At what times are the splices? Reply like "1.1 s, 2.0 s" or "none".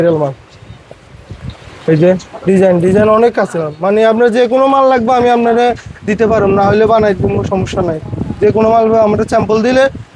none